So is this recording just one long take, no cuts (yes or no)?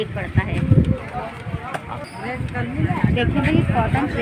yes